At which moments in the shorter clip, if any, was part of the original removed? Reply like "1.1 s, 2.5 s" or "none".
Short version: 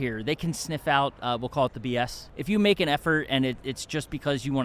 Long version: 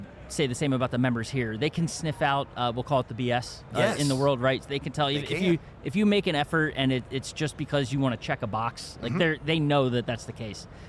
2.3 s